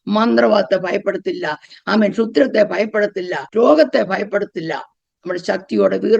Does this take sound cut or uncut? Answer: cut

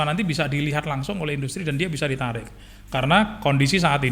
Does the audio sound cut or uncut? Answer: uncut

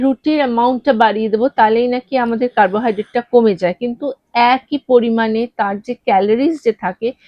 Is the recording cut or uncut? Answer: uncut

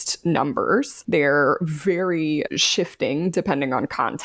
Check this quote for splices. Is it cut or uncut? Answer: cut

